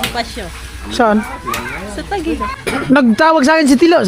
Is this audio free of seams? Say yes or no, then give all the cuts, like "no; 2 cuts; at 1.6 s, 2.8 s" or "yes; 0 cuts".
no; 1 cut; at 2.5 s